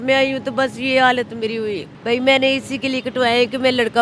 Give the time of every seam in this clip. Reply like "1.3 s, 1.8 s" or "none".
1.9 s